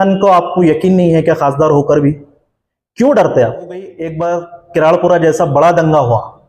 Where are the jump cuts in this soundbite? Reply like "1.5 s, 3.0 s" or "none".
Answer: 4.0 s